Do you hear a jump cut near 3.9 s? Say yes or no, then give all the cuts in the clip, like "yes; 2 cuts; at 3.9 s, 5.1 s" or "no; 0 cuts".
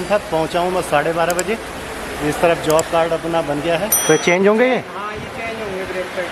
yes; 1 cut; at 3.9 s